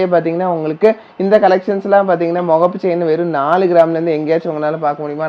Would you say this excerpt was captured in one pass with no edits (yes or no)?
yes